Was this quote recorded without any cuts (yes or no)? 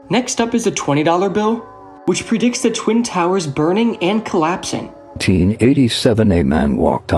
no